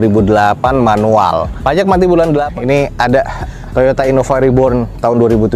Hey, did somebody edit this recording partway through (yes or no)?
yes